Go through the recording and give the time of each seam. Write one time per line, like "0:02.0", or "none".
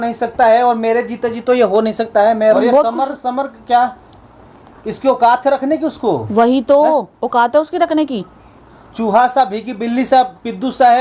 0:02.5